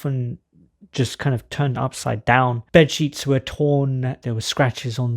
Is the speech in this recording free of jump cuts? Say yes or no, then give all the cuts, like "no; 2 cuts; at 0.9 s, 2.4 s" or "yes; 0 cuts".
no; 2 cuts; at 2.6 s, 4.2 s